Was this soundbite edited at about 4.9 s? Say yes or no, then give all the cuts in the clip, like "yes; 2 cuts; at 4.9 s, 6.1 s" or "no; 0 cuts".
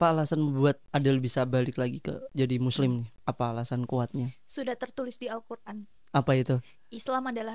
no; 3 cuts; at 0.8 s, 2.2 s, 3.1 s